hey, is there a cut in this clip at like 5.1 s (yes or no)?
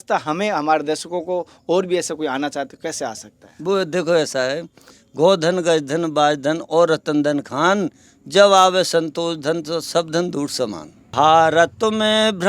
no